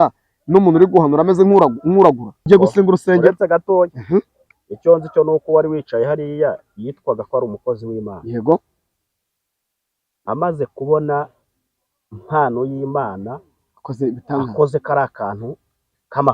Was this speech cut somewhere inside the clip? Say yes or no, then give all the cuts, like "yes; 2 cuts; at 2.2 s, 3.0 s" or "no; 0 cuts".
yes; 1 cut; at 2.5 s